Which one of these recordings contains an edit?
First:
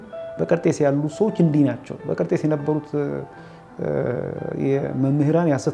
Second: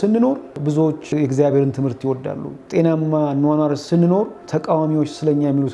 second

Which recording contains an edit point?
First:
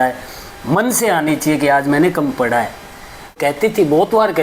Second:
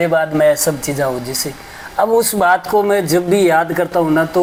first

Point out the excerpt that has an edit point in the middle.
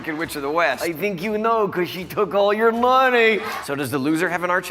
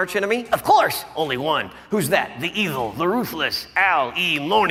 first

